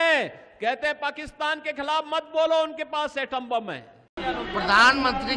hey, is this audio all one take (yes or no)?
no